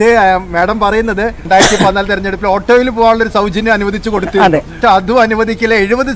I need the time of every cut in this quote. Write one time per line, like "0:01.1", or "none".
0:01.4
0:04.8